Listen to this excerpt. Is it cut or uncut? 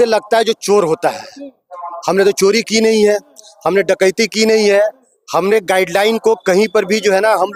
uncut